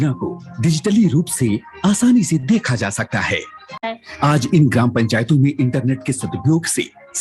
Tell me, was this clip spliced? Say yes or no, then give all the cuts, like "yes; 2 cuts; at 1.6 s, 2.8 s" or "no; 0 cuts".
yes; 1 cut; at 3.9 s